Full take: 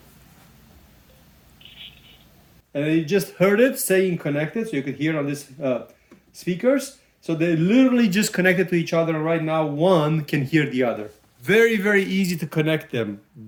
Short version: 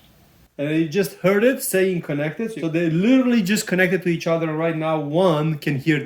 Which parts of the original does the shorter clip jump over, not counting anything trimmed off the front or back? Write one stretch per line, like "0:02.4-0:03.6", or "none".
0:04.6-0:07.1